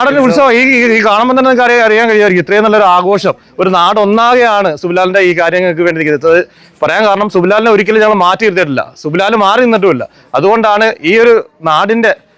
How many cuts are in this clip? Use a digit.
0